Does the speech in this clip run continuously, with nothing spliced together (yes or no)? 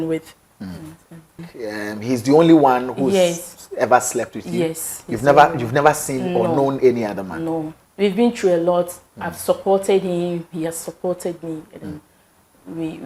no